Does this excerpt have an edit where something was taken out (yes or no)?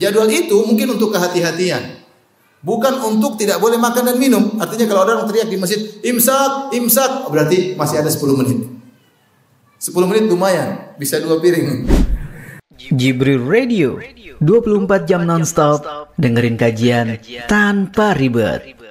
yes